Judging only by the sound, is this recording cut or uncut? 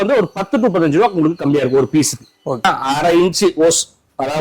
cut